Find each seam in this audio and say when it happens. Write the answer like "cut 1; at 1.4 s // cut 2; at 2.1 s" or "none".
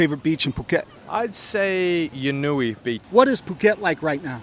cut 1; at 1.0 s // cut 2; at 3.0 s